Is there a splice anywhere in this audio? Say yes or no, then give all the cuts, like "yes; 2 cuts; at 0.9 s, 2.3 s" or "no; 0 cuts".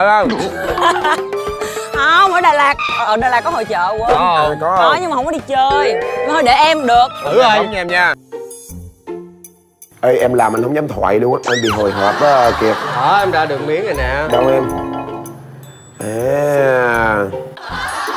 yes; 1 cut; at 8.2 s